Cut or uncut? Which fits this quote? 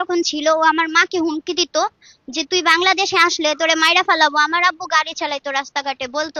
uncut